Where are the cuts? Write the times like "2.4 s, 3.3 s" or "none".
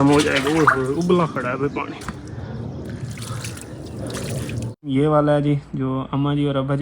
4.9 s